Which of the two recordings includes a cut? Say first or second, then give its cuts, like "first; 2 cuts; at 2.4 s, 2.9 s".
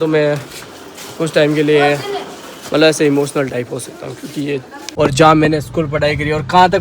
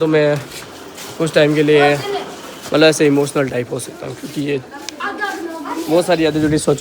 first; 1 cut; at 4.9 s